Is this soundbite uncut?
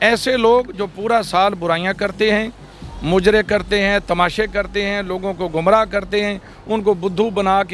yes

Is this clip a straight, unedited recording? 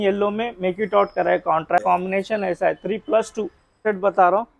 no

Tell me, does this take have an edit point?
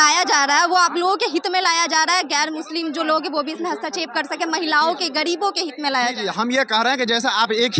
no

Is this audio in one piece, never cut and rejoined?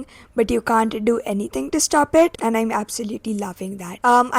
yes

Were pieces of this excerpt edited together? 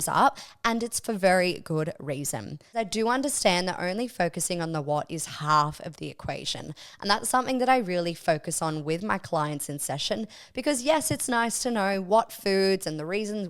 yes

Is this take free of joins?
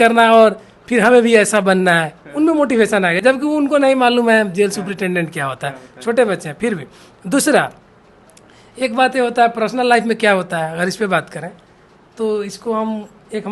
yes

